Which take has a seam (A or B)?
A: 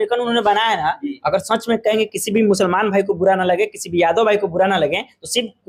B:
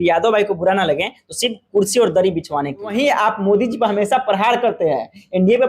B